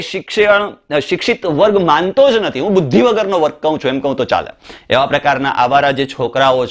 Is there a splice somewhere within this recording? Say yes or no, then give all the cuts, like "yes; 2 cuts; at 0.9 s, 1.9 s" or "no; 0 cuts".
yes; 1 cut; at 4.7 s